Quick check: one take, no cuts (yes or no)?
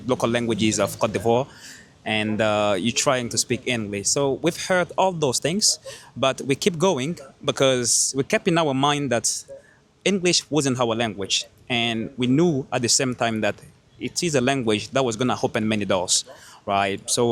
yes